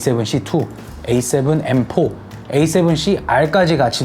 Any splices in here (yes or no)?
no